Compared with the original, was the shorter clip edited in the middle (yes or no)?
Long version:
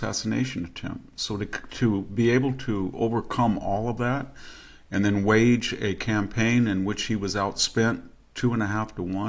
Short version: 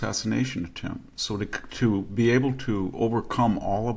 no